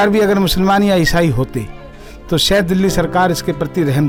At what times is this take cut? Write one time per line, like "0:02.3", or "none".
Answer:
none